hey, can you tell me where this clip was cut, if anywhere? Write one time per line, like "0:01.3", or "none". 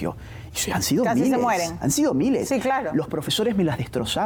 none